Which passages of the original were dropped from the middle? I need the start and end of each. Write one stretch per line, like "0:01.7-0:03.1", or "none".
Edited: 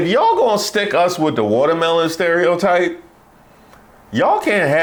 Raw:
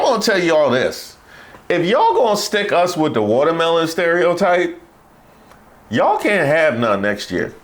none